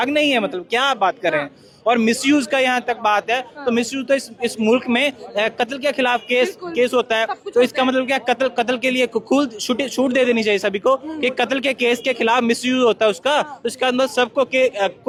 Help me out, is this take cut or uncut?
uncut